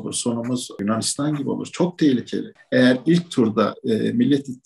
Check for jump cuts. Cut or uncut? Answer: cut